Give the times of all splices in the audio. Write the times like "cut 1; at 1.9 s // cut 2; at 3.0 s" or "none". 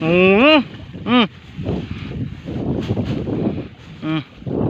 none